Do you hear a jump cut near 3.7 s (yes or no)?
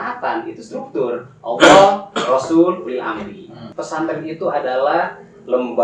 yes